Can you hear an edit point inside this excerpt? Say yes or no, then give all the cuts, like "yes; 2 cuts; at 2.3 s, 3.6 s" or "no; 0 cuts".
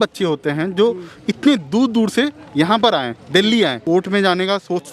yes; 1 cut; at 3.8 s